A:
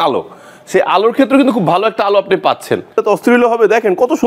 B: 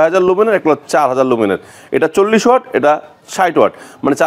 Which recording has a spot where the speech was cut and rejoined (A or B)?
A